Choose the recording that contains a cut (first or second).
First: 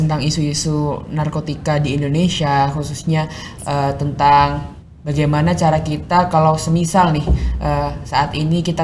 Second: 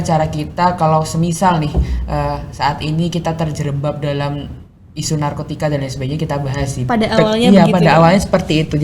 second